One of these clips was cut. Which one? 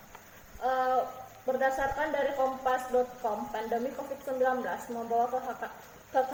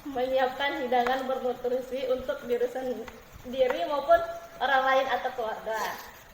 second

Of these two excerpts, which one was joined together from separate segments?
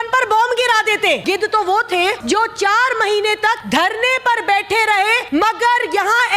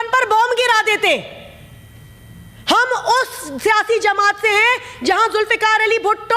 first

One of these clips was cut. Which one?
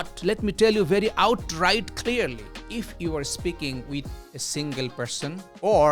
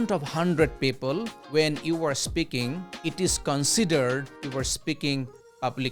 first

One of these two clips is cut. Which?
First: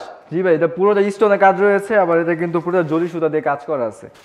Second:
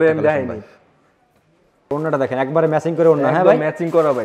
second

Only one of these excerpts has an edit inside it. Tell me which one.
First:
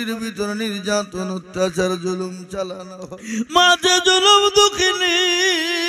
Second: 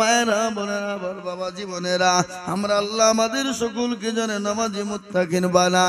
first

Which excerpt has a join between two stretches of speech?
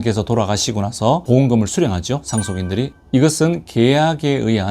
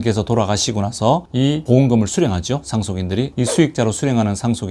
first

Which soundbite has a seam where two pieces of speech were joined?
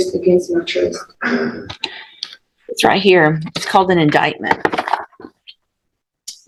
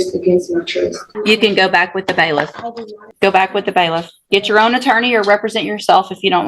second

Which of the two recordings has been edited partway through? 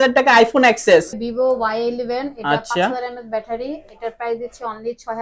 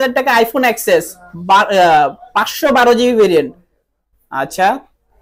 first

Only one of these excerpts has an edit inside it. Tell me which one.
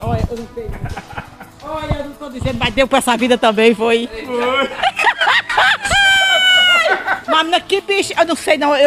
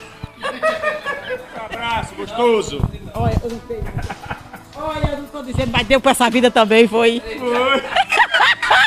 second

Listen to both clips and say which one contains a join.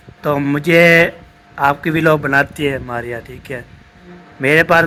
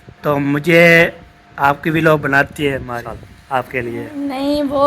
second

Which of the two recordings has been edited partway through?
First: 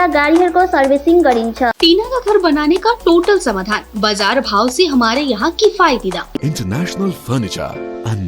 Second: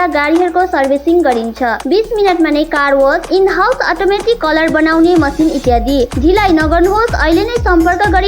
first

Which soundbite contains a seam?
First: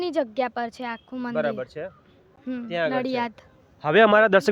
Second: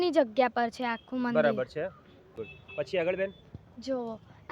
second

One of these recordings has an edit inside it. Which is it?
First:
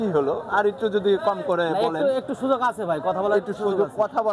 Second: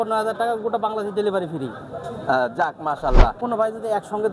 second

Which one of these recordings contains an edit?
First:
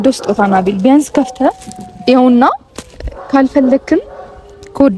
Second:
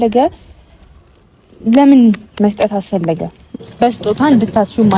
second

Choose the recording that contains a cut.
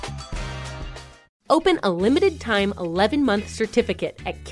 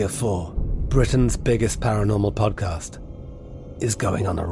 first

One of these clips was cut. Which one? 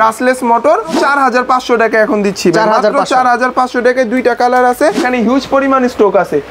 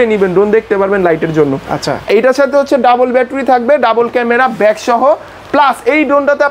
first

